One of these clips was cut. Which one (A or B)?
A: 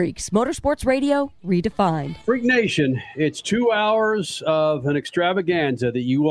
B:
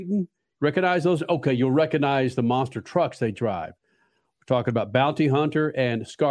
A